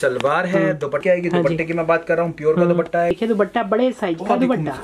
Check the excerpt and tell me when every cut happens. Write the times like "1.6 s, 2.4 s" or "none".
1.0 s, 3.1 s